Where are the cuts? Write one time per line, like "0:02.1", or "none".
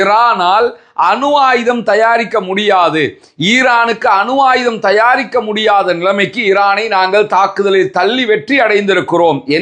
none

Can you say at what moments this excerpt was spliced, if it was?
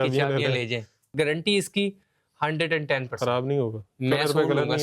0:01.1

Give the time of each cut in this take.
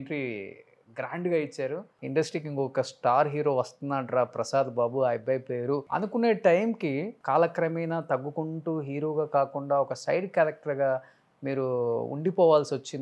0:02.0
0:05.9
0:07.1

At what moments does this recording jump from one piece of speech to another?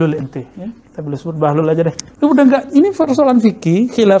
0:02.1

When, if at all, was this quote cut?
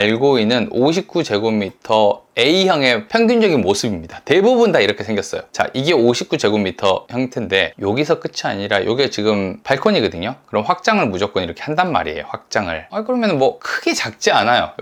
none

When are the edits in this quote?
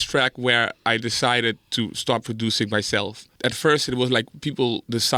0:03.3

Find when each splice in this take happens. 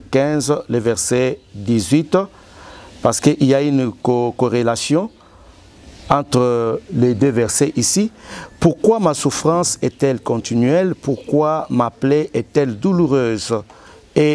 none

